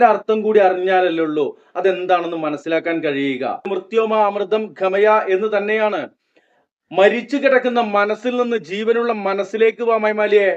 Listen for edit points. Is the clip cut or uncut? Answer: cut